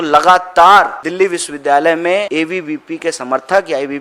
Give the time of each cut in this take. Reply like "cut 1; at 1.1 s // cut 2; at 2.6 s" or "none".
cut 1; at 1.0 s // cut 2; at 2.3 s